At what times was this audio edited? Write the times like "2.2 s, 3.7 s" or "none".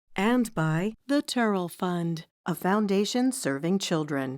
1.0 s